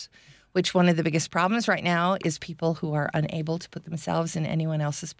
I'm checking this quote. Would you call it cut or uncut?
uncut